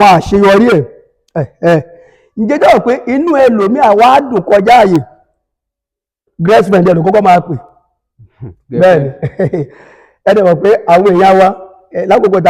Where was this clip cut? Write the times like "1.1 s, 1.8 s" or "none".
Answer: none